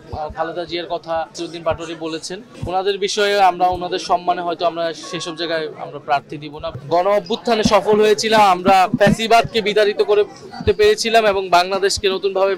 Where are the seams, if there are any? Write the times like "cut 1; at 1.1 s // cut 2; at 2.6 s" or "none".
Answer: cut 1; at 6.8 s